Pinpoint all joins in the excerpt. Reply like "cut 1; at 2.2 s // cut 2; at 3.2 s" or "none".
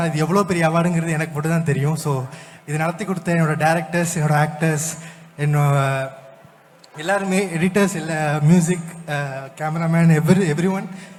none